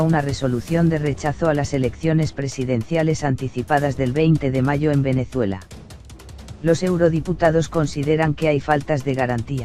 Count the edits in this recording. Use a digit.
0